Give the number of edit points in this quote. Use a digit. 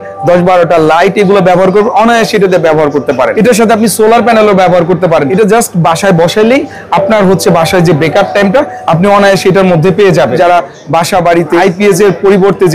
4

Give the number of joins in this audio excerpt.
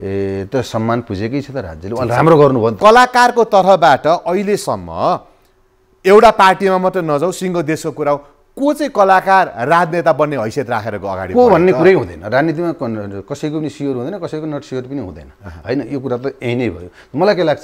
1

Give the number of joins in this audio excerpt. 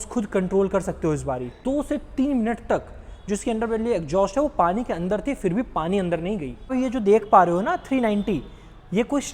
2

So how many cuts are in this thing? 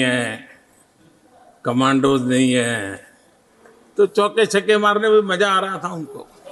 0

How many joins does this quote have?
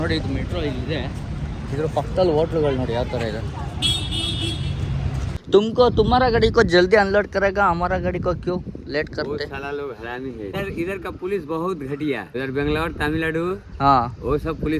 3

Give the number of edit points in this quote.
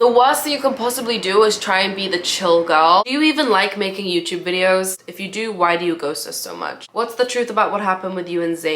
2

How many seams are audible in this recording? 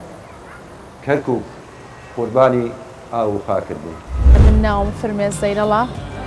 1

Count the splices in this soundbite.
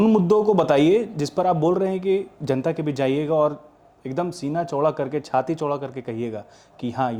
0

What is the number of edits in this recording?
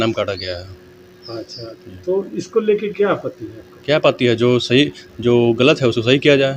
0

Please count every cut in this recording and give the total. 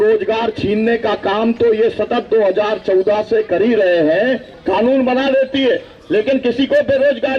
1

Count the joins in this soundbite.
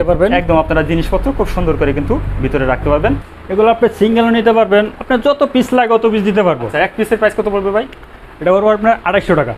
2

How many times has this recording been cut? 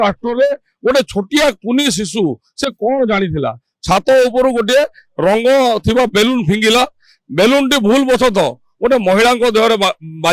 0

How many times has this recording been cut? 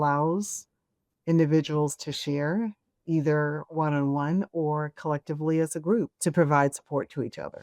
1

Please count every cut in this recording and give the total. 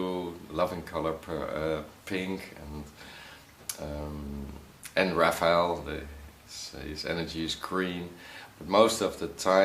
1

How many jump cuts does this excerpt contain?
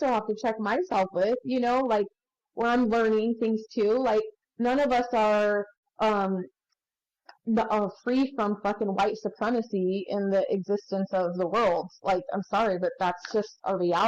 1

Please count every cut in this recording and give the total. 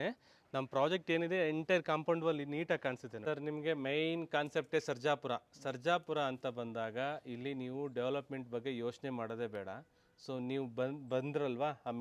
1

